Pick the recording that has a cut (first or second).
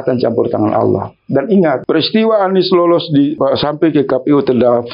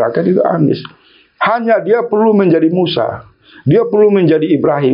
first